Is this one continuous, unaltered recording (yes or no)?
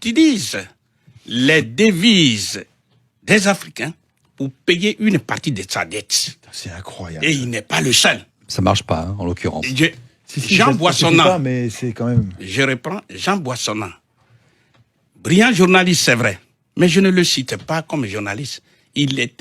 yes